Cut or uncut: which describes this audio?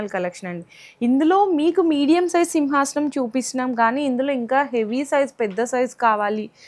uncut